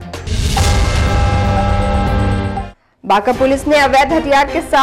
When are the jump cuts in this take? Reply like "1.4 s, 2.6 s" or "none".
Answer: 2.8 s